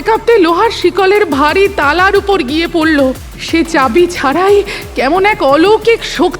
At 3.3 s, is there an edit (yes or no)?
yes